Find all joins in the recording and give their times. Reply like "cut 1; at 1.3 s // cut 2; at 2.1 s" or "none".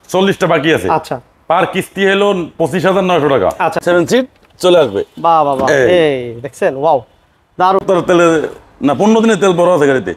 cut 1; at 3.8 s // cut 2; at 7.8 s

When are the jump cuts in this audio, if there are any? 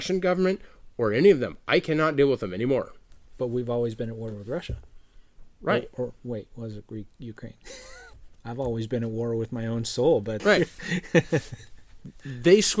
cut 1; at 8.1 s // cut 2; at 10.3 s

